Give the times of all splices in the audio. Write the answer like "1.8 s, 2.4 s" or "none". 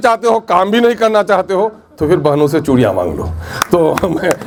none